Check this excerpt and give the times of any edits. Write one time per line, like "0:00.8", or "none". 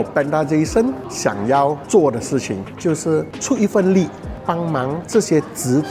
none